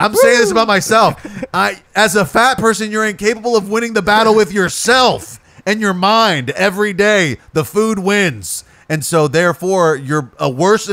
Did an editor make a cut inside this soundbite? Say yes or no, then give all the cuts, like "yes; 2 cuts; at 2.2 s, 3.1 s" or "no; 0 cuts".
no; 0 cuts